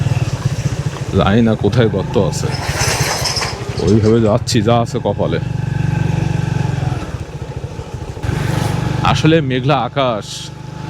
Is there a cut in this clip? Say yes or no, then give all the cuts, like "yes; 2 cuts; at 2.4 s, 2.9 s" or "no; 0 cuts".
no; 0 cuts